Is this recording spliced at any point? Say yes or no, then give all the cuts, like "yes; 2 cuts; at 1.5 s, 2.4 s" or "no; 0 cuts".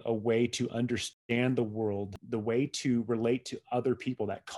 yes; 2 cuts; at 1.0 s, 2.2 s